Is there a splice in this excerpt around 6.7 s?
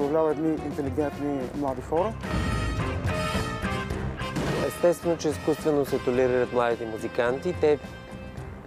no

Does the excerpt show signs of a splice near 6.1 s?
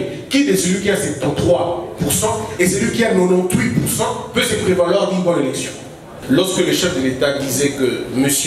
yes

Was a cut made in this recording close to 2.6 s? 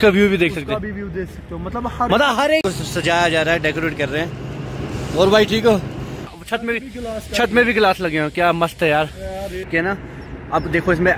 yes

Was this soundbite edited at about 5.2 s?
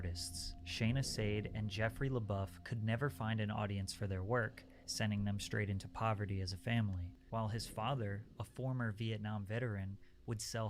no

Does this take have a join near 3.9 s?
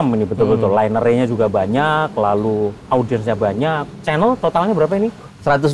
yes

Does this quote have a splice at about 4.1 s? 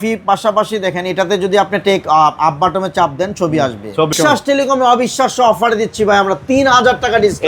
yes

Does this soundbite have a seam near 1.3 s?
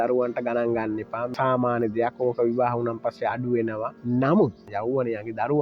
yes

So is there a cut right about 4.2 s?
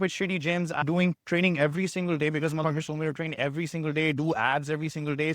no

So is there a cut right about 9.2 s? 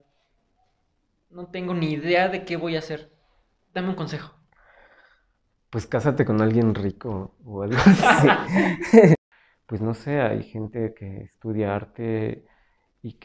yes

